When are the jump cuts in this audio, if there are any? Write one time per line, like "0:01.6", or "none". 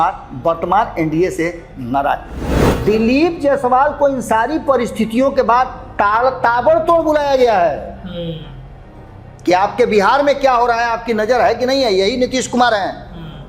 0:02.7